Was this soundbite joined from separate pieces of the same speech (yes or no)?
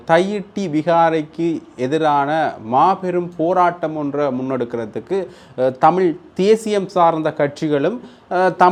no